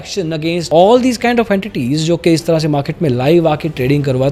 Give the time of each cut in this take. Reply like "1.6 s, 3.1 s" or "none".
none